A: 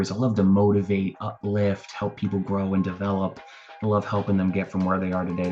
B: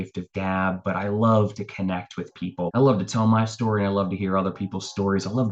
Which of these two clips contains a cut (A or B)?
B